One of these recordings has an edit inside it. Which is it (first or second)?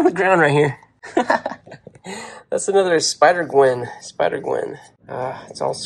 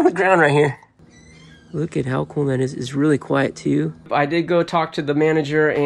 second